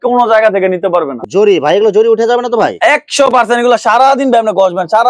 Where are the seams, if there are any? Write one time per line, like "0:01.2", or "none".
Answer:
0:01.1